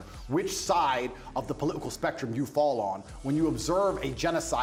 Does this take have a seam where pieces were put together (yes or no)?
no